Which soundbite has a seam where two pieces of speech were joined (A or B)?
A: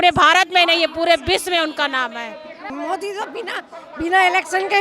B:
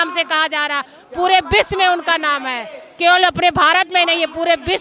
A